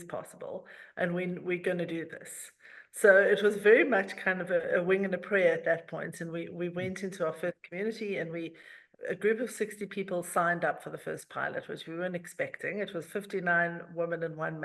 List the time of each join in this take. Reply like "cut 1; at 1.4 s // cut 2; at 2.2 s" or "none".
none